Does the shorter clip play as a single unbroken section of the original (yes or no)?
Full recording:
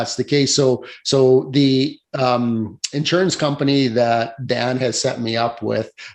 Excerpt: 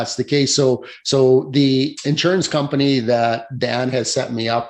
no